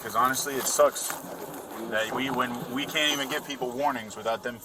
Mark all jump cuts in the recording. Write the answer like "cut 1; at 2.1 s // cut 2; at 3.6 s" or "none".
none